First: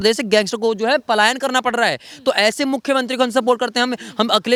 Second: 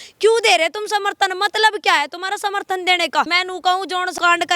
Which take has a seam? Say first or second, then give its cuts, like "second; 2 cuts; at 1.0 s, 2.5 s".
second; 1 cut; at 3.4 s